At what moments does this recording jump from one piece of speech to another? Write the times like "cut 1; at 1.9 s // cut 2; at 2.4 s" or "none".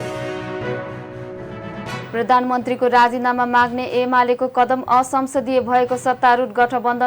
cut 1; at 1.1 s